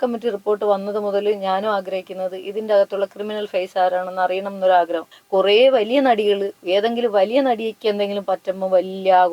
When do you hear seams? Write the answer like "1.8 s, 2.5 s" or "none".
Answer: 5.1 s